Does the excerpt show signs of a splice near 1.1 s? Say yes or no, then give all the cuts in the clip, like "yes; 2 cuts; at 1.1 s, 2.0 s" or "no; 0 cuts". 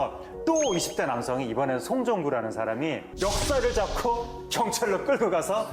no; 1 cut; at 3.1 s